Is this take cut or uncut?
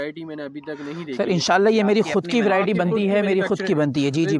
uncut